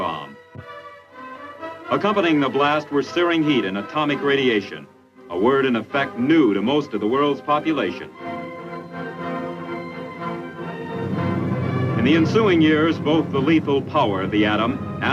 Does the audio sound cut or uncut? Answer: cut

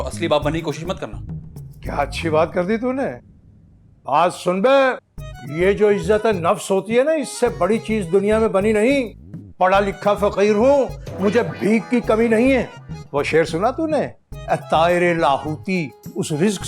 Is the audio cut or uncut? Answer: uncut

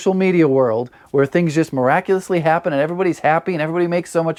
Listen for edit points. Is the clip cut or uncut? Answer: uncut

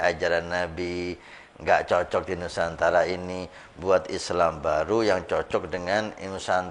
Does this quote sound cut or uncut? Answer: uncut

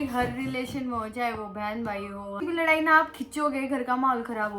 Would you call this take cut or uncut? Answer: cut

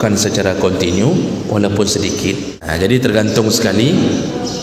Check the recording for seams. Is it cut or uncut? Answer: cut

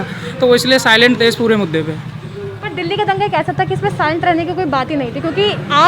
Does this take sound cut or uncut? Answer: uncut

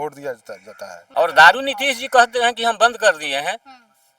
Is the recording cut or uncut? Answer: cut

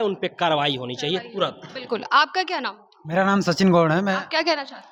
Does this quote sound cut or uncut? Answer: uncut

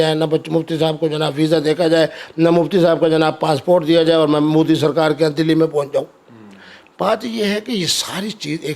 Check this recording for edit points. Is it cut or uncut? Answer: uncut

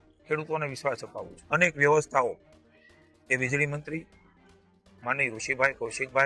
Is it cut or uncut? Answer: cut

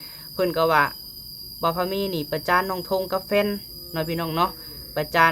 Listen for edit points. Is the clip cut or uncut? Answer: uncut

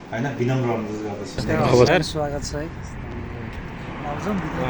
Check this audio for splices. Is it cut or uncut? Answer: cut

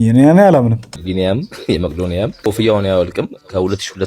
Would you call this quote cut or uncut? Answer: cut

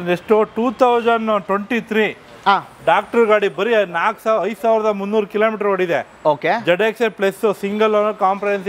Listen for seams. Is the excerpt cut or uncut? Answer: uncut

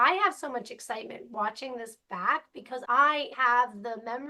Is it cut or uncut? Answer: cut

